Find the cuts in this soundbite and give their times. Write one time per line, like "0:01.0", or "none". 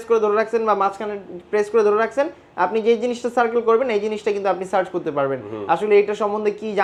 none